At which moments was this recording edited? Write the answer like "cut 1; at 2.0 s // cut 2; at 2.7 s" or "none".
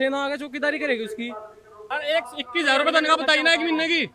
cut 1; at 1.9 s